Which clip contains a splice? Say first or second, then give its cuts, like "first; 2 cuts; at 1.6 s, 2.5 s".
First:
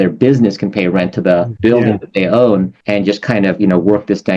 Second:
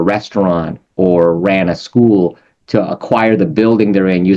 first; 2 cuts; at 1.5 s, 2.8 s